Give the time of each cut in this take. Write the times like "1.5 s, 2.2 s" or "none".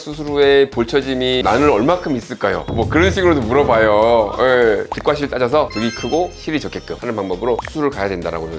4.9 s, 6.9 s